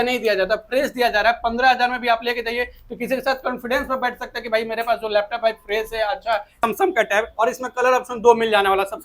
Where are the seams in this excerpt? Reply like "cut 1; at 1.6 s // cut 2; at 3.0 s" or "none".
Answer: cut 1; at 6.6 s